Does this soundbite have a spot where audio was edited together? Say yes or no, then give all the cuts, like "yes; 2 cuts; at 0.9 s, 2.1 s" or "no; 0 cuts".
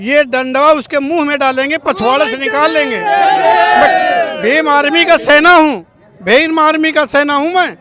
no; 0 cuts